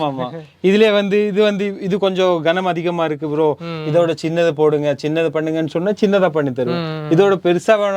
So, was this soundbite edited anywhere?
no; 0 cuts

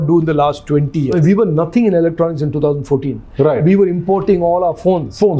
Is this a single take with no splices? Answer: no; 1 cut; at 1.1 s

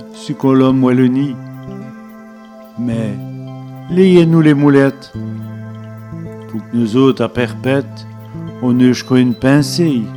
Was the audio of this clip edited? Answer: no; 0 cuts

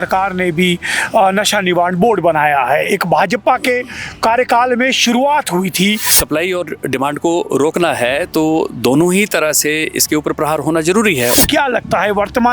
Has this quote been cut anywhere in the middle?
yes; 2 cuts; at 6.1 s, 11.3 s

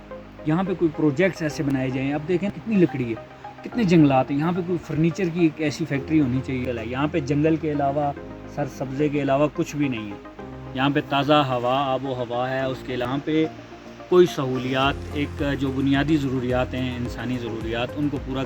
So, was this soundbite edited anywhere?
yes; 3 cuts; at 2.5 s, 6.6 s, 13.1 s

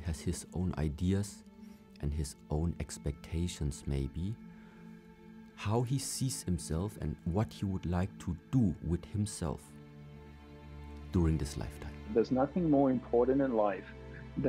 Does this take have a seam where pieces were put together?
yes; 1 cut; at 12.1 s

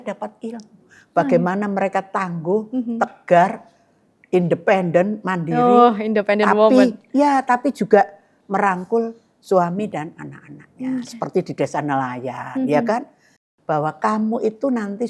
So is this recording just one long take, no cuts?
no; 1 cut; at 13.4 s

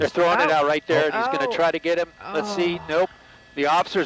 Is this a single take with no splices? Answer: yes; 0 cuts

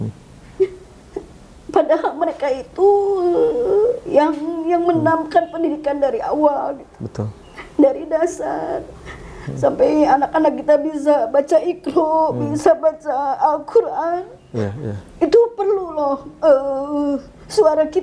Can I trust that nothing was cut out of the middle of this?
yes; 0 cuts

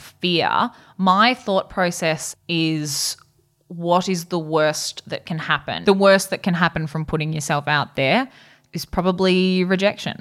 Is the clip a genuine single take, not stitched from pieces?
no; 2 cuts; at 2.3 s, 5.8 s

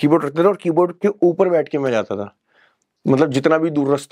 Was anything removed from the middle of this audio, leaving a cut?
no; 0 cuts

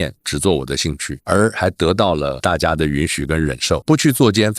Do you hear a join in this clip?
yes; 2 cuts; at 2.4 s, 3.8 s

